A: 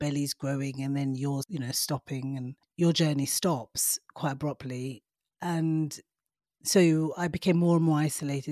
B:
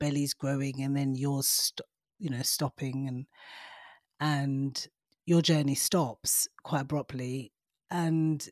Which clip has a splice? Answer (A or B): A